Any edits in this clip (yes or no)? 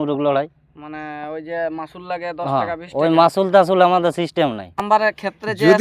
yes